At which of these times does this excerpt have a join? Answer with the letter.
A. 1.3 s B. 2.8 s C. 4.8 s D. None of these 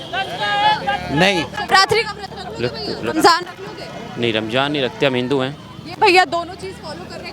D